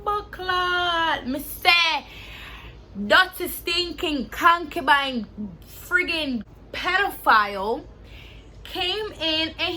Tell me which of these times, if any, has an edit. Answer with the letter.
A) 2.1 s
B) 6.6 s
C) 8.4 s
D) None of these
B